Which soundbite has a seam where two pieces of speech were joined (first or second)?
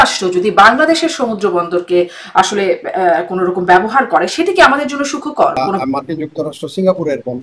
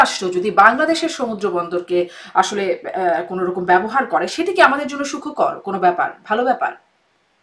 first